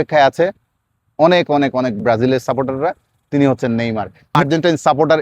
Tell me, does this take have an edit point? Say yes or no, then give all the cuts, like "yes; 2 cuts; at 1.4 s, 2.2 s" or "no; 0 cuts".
yes; 2 cuts; at 2.0 s, 4.4 s